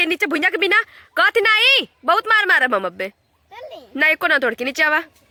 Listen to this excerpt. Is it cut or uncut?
uncut